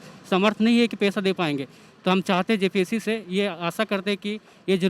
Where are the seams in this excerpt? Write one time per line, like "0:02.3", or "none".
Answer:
none